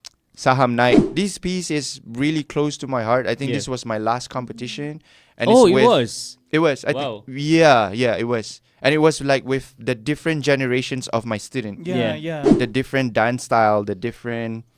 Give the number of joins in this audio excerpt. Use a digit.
2